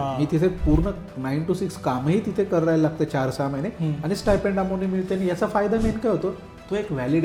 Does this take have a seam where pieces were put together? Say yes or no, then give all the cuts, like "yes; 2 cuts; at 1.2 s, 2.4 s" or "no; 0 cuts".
no; 0 cuts